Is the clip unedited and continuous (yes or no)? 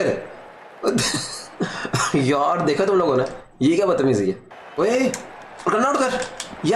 no